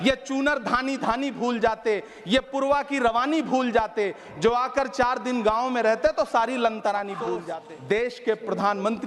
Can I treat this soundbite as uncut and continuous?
no; 1 cut; at 7.4 s

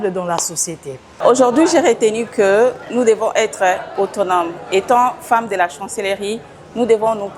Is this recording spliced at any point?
yes; 1 cut; at 1.2 s

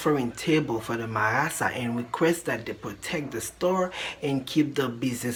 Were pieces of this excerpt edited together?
no; 0 cuts

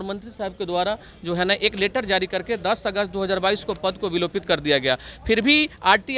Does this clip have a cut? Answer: no; 0 cuts

